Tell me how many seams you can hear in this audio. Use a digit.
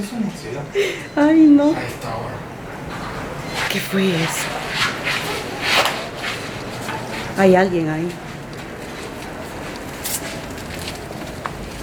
0